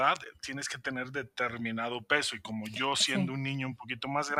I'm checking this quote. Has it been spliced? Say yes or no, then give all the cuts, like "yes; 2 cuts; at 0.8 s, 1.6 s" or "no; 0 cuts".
no; 0 cuts